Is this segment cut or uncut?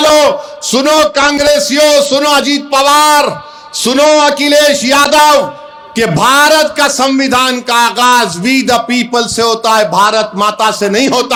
uncut